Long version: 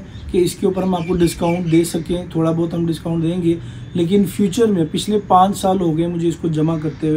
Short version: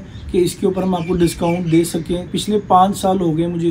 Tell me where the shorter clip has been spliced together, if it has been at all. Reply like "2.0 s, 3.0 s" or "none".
2.3 s